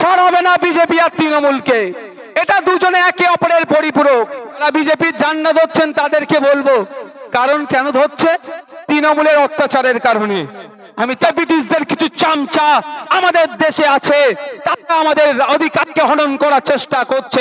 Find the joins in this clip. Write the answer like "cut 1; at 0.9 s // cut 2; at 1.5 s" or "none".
cut 1; at 4.6 s // cut 2; at 11.2 s